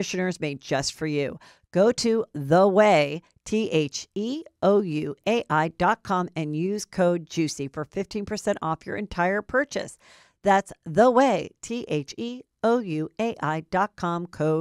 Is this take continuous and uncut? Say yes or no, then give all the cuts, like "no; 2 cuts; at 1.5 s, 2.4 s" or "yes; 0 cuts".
yes; 0 cuts